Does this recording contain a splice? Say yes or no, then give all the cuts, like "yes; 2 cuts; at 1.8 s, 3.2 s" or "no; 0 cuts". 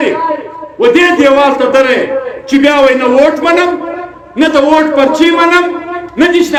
no; 0 cuts